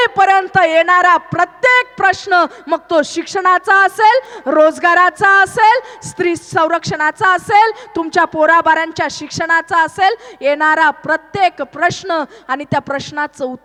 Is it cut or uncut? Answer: uncut